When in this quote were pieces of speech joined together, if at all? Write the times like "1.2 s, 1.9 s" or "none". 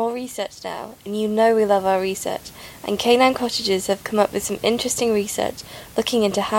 none